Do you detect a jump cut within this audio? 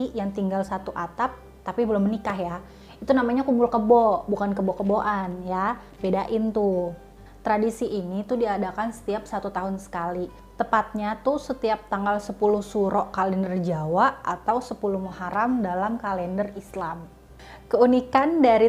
no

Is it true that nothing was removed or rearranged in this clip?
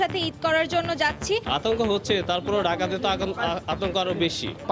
no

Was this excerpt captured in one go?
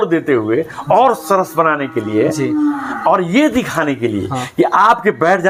yes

